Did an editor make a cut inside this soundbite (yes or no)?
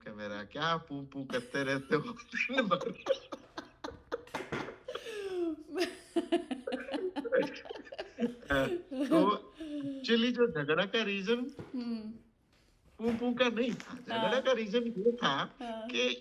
no